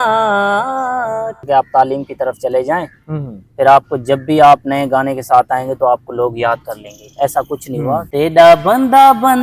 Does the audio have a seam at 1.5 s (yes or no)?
yes